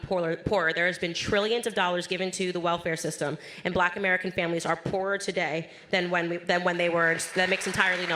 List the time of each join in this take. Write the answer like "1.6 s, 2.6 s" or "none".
none